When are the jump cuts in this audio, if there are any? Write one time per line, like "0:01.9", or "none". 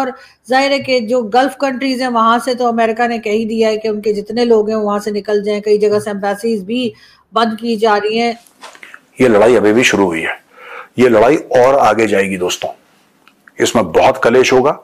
0:08.4